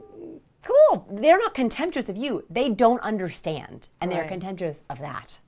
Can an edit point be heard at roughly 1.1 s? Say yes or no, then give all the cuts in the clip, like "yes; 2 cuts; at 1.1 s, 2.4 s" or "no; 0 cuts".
yes; 1 cut; at 1.1 s